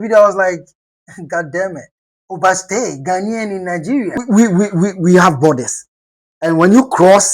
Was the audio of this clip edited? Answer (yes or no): yes